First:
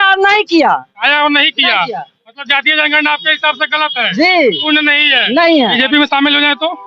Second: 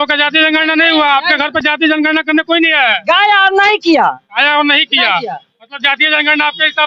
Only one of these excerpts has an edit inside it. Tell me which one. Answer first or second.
first